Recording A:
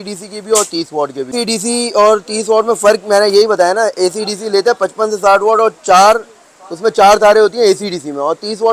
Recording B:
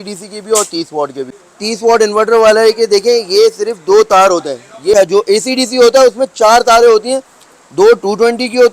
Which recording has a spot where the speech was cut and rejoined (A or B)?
B